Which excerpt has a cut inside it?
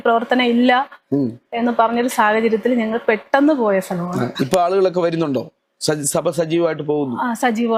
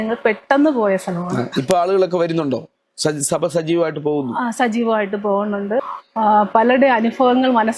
second; 1 cut; at 6.0 s

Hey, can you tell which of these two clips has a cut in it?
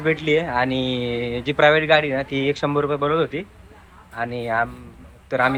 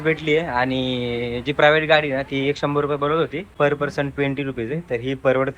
second; 1 cut; at 3.4 s

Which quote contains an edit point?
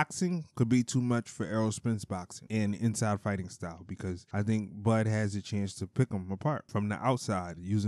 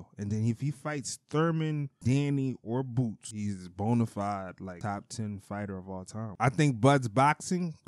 second; 2 cuts; at 3.3 s, 6.2 s

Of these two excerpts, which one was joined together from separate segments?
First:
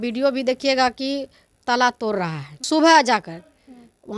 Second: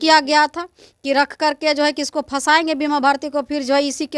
first; 1 cut; at 2.6 s

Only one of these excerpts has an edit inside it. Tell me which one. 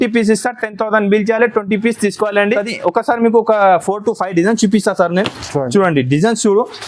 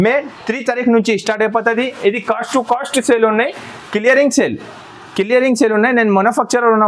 first; 1 cut; at 2.6 s

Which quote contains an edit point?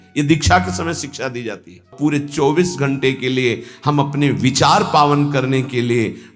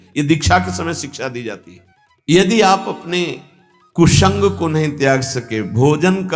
first; 1 cut; at 1.9 s

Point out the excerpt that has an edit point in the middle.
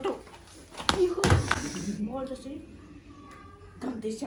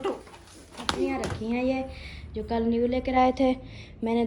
second; 1 cut; at 1.1 s

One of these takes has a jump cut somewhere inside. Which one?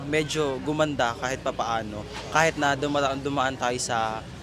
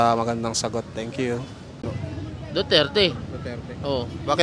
second; 1 cut; at 1.9 s

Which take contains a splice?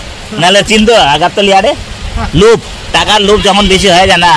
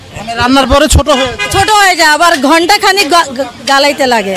first; 1 cut; at 2.2 s

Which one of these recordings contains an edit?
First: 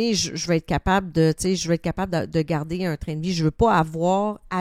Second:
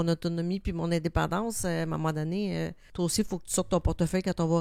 second; 1 cut; at 2.8 s

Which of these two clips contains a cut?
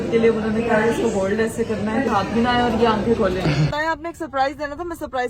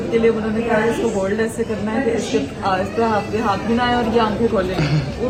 first; 2 cuts; at 2.1 s, 3.7 s

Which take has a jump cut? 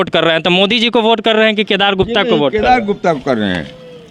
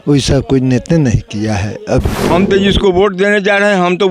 second; 1 cut; at 2.2 s

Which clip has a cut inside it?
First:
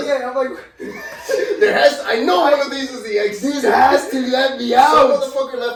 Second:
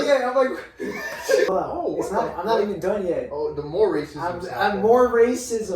second; 1 cut; at 1.5 s

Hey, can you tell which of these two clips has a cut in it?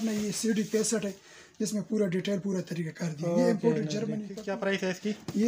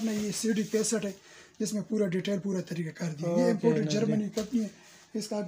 first; 1 cut; at 4.3 s

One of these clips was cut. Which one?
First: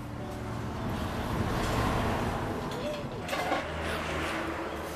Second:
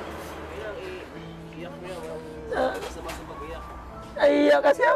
first; 1 cut; at 3.2 s

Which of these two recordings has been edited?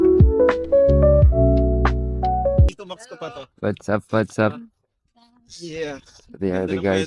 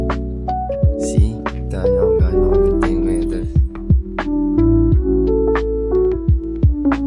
first; 1 cut; at 2.7 s

